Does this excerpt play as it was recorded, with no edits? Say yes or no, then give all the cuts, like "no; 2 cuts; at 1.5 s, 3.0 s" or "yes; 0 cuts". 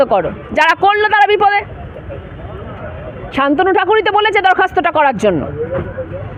yes; 0 cuts